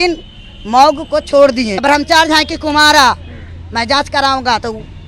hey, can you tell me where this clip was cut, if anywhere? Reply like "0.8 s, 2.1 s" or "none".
1.8 s